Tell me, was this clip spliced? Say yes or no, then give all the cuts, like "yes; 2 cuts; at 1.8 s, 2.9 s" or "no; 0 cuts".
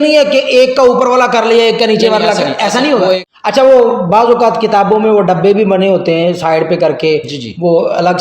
yes; 1 cut; at 3.3 s